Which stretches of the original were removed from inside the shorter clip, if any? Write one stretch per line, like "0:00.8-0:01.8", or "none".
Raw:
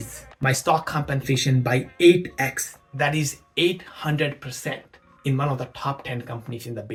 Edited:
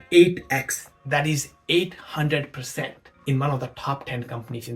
0:04.9-0:05.0